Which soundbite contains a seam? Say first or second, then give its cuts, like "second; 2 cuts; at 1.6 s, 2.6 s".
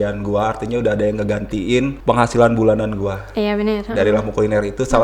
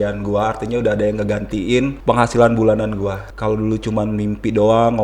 second; 1 cut; at 3.2 s